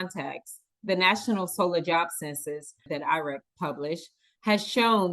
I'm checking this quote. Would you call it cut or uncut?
cut